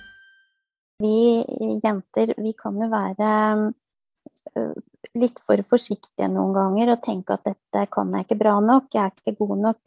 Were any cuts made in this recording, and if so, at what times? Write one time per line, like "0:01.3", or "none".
0:01.0

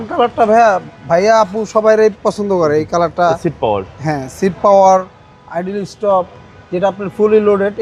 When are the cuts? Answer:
none

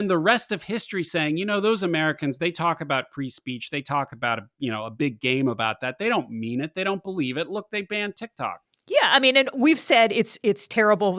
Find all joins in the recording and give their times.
0:08.7

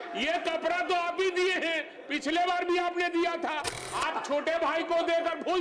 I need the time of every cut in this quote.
0:03.4

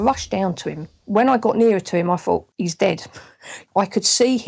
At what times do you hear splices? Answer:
0:00.9
0:03.1

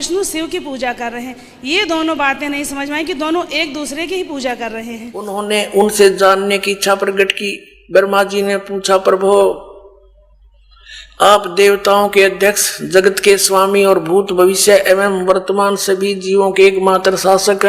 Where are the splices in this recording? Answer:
0:05.4

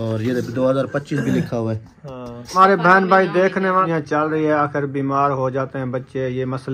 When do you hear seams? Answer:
0:02.6
0:03.9

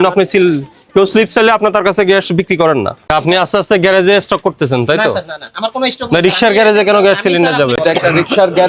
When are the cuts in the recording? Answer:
0:03.0
0:07.8

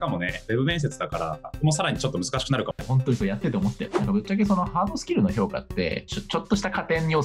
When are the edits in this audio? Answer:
0:02.8
0:03.9

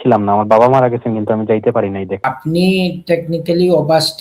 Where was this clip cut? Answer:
0:02.2

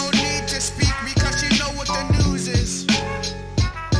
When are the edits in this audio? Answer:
0:03.0

